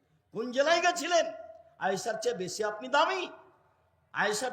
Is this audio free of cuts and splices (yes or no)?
yes